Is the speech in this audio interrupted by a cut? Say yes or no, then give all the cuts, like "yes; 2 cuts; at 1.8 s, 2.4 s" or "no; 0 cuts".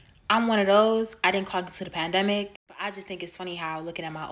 yes; 1 cut; at 2.6 s